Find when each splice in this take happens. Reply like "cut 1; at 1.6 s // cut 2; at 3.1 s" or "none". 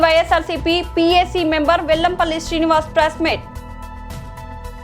cut 1; at 3.4 s